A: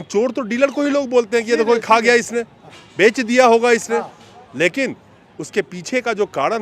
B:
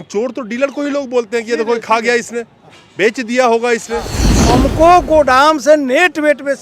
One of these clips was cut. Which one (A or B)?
B